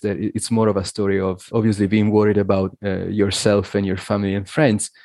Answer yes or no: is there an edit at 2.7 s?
yes